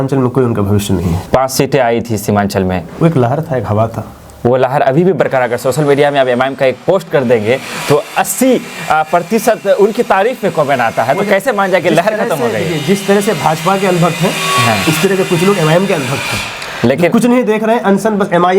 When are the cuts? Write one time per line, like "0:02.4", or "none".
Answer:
0:01.2